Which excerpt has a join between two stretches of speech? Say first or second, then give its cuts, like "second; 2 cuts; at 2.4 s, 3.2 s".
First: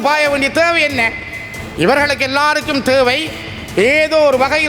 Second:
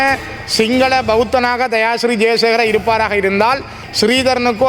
second; 1 cut; at 3.8 s